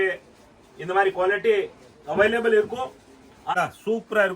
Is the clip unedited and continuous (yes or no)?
no